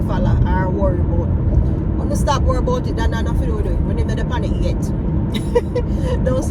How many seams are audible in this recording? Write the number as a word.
zero